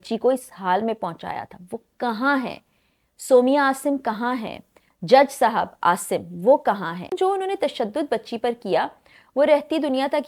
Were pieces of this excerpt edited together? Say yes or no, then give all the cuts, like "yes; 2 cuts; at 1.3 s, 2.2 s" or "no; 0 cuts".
yes; 1 cut; at 7.1 s